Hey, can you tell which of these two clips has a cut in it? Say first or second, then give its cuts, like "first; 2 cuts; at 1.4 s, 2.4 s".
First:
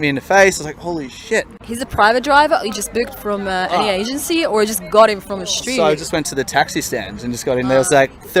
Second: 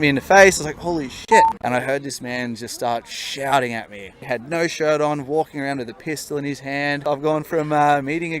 second; 3 cuts; at 1.6 s, 4.1 s, 7.0 s